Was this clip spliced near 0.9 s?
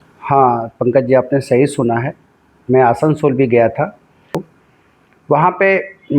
no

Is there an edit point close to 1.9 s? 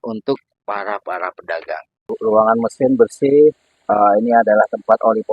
yes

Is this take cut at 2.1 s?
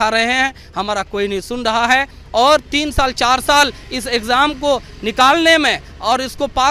no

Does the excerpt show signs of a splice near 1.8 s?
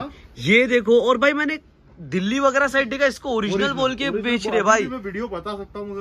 no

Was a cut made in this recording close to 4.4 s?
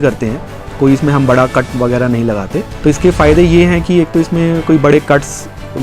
no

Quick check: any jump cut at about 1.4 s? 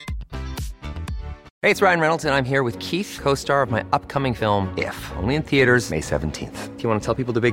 yes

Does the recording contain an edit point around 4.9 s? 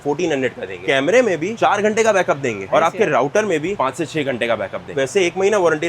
yes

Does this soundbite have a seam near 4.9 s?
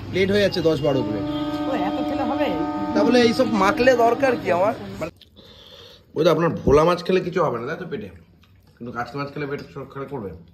yes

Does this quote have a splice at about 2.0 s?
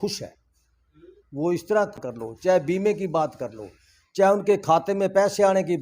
yes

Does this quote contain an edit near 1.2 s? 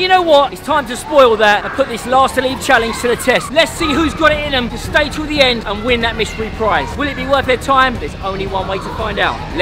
no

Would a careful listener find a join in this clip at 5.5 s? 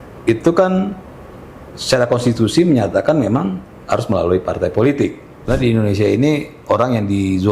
yes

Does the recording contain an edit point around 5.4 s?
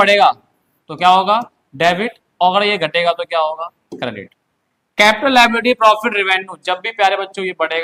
no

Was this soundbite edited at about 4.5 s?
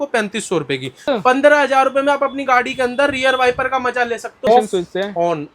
yes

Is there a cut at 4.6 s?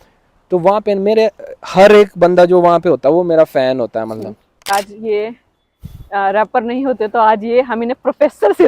yes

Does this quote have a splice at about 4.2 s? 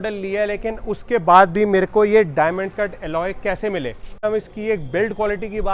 yes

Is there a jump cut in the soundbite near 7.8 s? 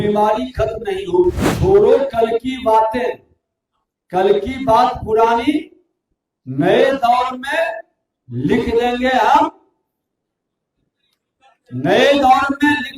no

